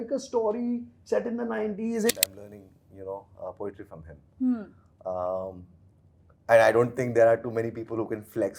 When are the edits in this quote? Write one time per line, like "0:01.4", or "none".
0:02.2